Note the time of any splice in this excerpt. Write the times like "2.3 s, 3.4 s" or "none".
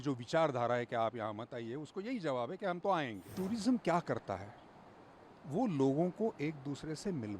3.3 s